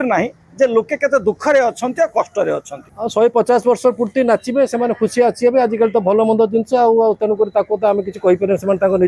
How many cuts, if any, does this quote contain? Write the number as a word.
one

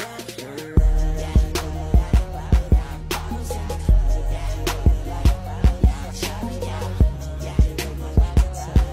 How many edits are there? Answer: zero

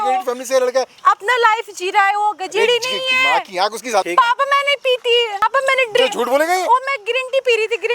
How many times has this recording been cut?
three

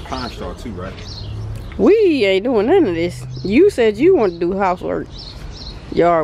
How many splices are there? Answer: zero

